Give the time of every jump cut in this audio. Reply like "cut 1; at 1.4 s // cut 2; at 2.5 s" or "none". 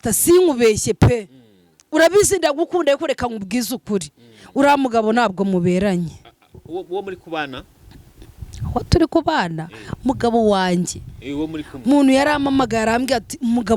none